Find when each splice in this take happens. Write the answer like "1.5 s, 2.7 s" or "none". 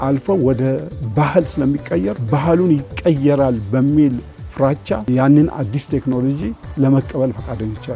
2.2 s, 5.1 s